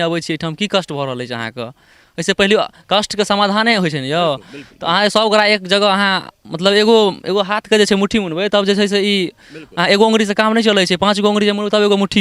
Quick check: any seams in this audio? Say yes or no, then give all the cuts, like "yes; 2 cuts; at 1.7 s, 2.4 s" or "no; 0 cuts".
no; 0 cuts